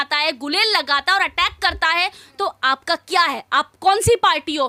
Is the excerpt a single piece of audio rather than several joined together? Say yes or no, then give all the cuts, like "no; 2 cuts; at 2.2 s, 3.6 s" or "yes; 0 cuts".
yes; 0 cuts